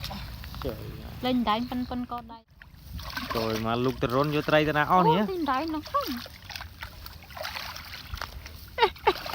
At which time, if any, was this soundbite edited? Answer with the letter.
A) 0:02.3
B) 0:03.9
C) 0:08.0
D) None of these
A